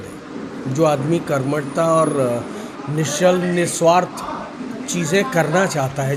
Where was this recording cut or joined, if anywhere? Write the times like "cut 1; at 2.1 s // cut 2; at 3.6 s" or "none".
none